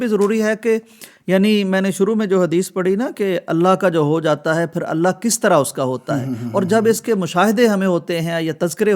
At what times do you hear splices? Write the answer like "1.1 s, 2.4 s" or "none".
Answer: none